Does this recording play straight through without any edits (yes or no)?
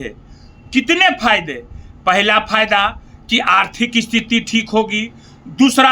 yes